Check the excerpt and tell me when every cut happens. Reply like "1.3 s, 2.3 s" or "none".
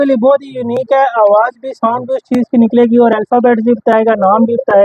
none